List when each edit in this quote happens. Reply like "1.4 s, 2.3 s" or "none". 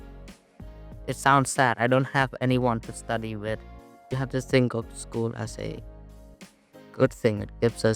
4.0 s